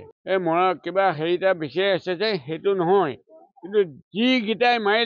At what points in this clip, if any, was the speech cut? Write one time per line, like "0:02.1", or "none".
none